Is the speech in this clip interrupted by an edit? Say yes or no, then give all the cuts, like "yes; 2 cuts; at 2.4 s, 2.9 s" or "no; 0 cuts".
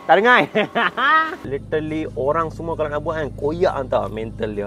yes; 1 cut; at 1.5 s